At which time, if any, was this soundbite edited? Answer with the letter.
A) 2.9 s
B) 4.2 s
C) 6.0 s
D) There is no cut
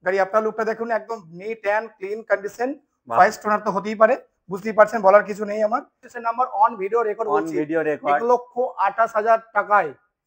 C